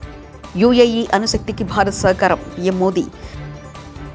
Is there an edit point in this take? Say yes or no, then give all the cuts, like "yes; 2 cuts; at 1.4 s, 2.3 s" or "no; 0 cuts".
no; 0 cuts